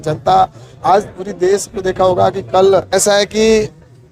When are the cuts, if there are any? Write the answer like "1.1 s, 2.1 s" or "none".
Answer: 2.9 s